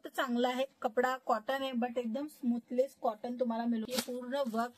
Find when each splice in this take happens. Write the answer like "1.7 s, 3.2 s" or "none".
3.8 s